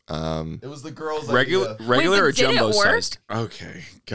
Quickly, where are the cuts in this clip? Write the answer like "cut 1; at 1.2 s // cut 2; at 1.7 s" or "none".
cut 1; at 3.2 s